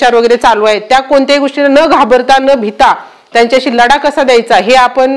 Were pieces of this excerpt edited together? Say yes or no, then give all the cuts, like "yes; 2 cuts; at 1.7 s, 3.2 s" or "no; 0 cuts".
no; 0 cuts